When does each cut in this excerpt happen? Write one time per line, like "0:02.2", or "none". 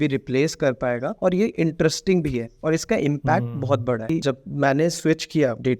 0:04.1